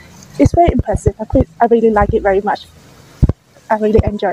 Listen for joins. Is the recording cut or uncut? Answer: uncut